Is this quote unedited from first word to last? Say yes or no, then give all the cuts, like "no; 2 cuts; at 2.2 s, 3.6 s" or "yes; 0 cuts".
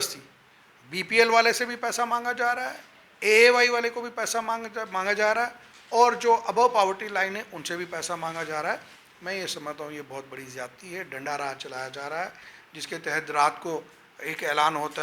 yes; 0 cuts